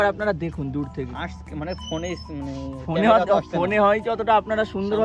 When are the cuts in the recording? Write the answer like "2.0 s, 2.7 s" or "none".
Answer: none